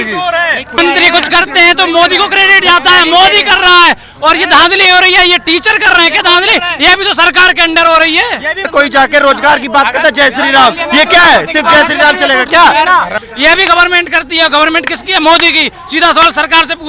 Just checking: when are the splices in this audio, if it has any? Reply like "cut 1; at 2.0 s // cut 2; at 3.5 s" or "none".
cut 1; at 0.8 s // cut 2; at 8.7 s // cut 3; at 13.2 s